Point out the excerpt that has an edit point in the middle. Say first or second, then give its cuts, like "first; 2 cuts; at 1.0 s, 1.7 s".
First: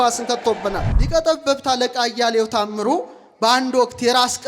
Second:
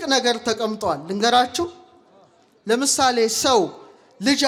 first; 1 cut; at 0.9 s